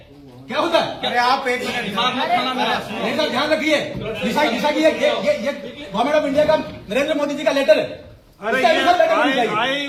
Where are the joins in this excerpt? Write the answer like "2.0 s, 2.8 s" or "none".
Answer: none